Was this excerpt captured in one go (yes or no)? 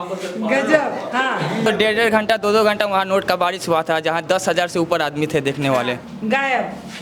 no